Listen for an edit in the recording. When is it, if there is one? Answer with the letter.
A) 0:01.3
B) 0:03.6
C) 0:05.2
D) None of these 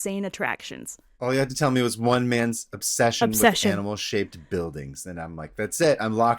A